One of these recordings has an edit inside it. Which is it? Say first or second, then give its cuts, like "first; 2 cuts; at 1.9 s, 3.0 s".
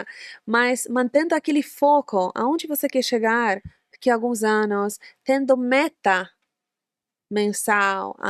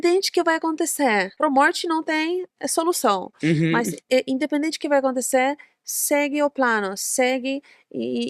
second; 1 cut; at 1.3 s